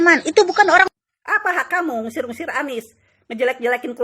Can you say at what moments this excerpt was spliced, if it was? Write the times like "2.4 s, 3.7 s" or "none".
1.1 s

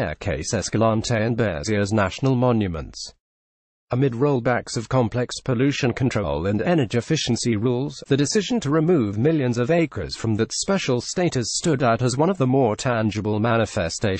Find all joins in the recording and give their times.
none

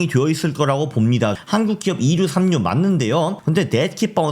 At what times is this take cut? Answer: 1.4 s, 3.4 s

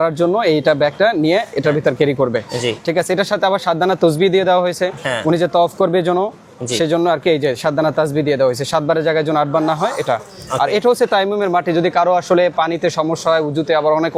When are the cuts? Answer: none

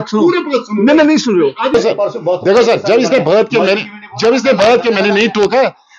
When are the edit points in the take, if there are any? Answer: 1.7 s

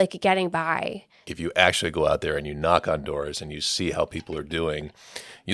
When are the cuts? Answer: 1.2 s

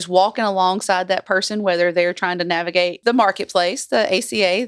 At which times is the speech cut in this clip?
3.0 s

